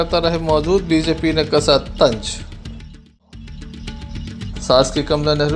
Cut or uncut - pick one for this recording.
uncut